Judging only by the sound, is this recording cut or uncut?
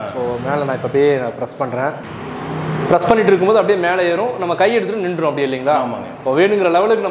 uncut